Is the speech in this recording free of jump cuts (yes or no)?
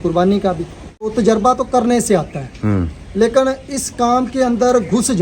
no